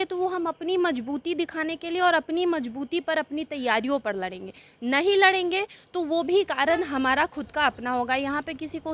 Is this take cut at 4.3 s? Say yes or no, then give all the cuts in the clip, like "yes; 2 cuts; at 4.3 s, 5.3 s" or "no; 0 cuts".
no; 0 cuts